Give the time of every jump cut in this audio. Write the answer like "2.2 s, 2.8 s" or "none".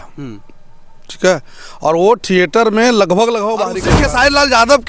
3.8 s